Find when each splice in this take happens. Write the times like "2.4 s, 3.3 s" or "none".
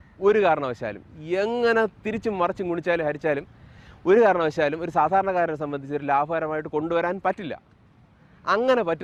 none